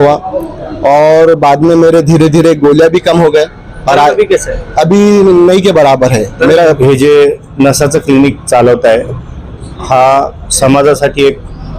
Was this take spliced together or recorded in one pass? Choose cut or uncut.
cut